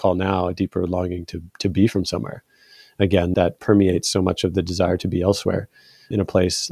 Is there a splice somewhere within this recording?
yes; 1 cut; at 3.3 s

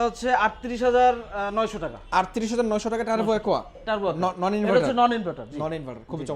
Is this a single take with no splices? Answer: yes; 0 cuts

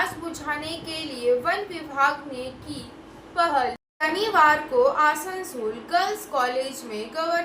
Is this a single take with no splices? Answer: no; 1 cut; at 3.9 s

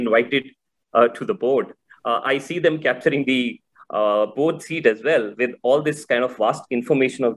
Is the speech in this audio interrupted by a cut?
no; 0 cuts

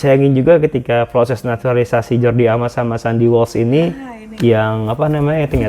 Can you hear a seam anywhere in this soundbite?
no; 0 cuts

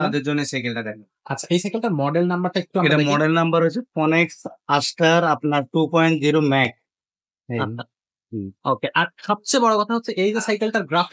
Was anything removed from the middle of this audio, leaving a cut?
no; 0 cuts

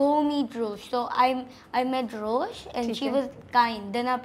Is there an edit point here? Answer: no; 0 cuts

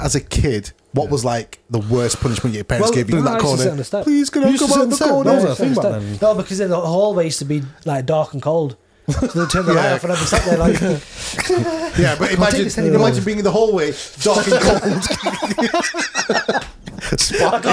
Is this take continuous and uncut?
no; 1 cut; at 3.1 s

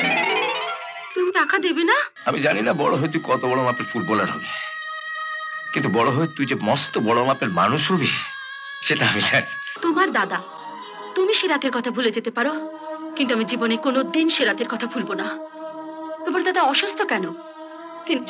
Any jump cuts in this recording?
yes; 2 cuts; at 2.1 s, 9.6 s

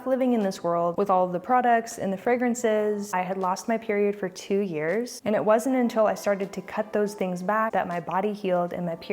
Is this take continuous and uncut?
no; 4 cuts; at 0.9 s, 3.1 s, 5.1 s, 7.7 s

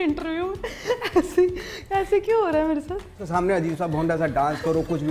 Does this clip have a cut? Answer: yes; 1 cut; at 3.2 s

